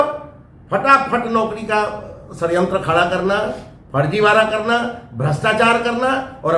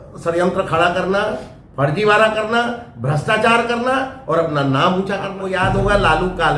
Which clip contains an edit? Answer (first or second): second